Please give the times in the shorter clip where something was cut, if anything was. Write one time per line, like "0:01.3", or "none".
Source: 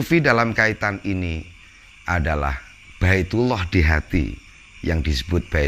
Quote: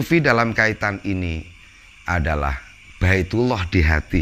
none

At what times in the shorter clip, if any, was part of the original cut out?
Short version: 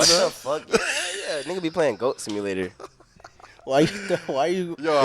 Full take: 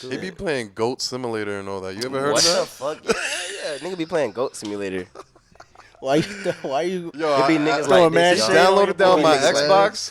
none

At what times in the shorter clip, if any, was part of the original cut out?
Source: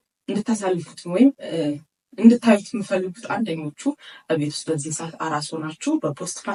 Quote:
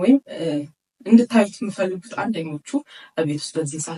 none

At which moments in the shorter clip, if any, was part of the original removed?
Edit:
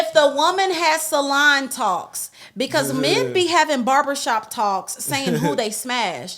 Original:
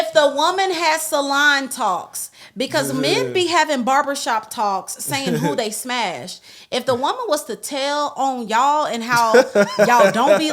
none

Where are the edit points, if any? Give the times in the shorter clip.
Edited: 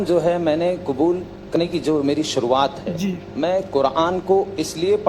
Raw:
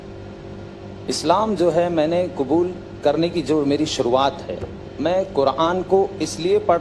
0:01.5

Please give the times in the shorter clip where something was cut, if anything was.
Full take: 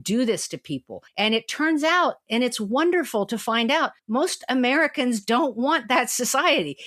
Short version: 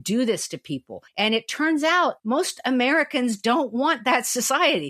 0:02.2

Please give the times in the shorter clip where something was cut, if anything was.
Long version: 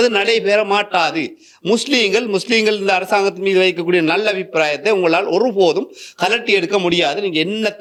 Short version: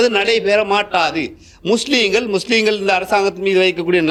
none

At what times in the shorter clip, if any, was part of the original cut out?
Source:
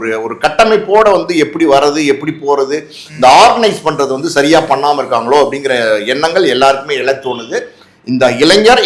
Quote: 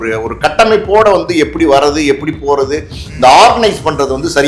none

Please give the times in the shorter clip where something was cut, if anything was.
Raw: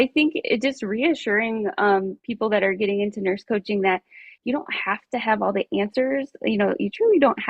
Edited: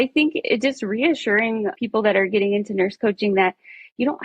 0:01.7

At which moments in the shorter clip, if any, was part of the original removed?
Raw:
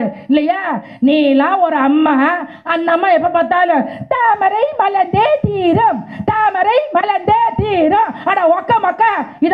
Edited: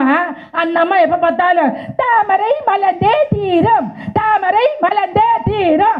none

